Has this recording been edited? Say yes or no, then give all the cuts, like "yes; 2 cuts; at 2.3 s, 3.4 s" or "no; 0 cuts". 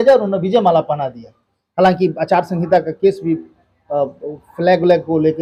no; 0 cuts